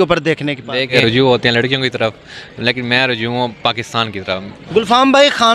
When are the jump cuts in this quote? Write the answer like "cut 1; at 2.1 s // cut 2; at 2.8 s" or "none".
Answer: cut 1; at 0.9 s // cut 2; at 4.5 s